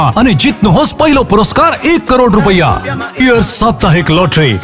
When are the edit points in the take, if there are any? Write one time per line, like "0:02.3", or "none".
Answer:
0:03.2